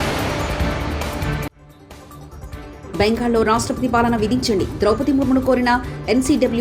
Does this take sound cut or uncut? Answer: cut